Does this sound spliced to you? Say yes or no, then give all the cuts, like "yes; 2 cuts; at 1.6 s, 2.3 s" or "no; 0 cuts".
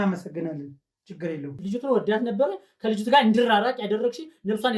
yes; 1 cut; at 1.6 s